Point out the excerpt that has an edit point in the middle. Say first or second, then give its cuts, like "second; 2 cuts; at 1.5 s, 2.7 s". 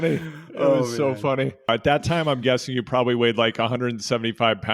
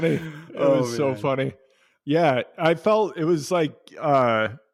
first; 1 cut; at 1.7 s